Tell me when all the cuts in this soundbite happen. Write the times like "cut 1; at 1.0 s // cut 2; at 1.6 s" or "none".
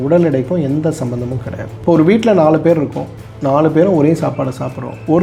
none